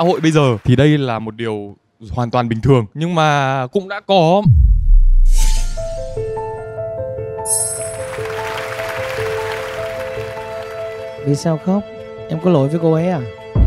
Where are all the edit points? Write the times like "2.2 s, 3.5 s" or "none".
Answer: none